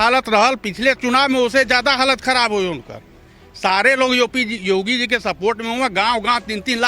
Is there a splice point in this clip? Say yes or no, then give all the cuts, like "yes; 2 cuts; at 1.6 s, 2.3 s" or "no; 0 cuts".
no; 0 cuts